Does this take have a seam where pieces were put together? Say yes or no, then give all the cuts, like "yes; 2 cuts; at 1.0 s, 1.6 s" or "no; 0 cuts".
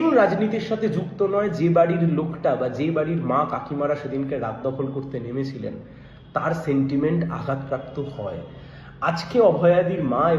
no; 0 cuts